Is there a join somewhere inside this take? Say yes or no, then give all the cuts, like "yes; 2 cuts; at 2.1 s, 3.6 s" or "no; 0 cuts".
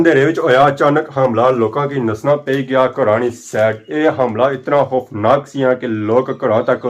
no; 0 cuts